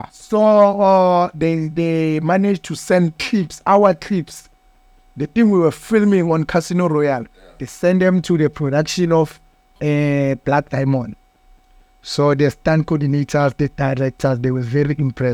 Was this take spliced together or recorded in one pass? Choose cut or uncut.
uncut